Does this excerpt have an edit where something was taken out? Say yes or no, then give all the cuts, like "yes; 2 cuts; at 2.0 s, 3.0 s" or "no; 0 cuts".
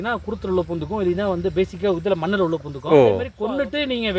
yes; 1 cut; at 3.3 s